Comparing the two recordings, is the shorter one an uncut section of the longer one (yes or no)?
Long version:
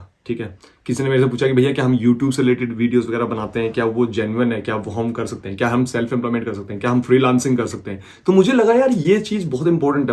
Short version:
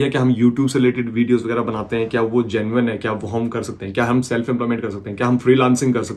yes